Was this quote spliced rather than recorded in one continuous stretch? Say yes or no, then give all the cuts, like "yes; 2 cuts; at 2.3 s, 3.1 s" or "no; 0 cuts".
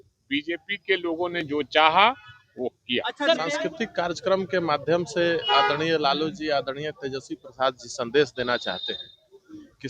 yes; 1 cut; at 3.4 s